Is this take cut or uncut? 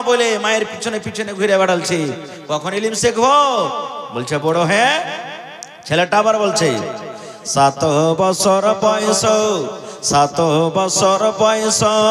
uncut